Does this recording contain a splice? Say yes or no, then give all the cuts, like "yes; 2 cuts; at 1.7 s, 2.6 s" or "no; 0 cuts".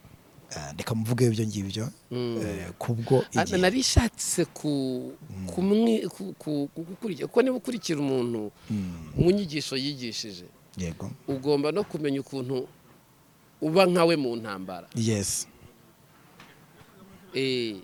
no; 0 cuts